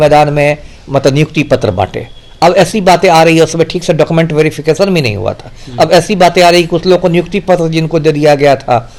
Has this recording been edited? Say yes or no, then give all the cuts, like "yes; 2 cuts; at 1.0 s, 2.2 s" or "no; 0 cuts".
no; 0 cuts